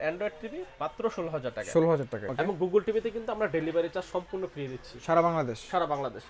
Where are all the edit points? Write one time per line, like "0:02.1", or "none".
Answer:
0:02.2